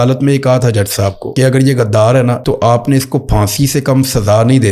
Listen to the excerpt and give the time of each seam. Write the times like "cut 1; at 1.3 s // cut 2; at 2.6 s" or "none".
cut 1; at 1.2 s // cut 2; at 2.4 s